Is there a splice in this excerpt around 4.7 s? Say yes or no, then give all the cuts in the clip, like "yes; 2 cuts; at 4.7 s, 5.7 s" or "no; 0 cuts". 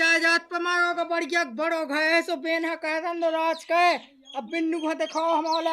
no; 0 cuts